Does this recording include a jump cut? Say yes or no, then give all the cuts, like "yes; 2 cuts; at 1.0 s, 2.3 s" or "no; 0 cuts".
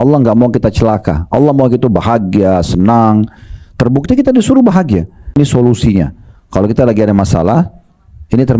yes; 1 cut; at 5.3 s